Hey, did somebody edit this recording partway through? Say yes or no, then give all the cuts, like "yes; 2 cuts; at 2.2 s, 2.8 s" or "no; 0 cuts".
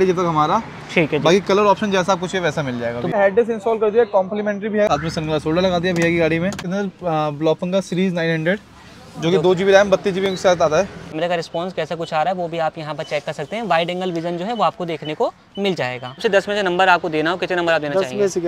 yes; 5 cuts; at 3.1 s, 4.9 s, 6.6 s, 11.2 s, 16.2 s